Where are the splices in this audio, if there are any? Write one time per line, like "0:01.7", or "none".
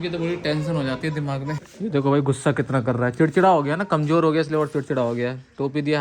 0:01.6